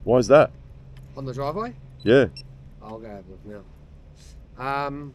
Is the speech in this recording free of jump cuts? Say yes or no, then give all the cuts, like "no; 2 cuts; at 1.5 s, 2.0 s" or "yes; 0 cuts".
yes; 0 cuts